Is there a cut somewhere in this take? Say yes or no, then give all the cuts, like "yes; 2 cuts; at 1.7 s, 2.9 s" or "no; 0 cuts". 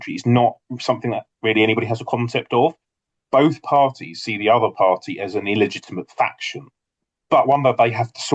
no; 0 cuts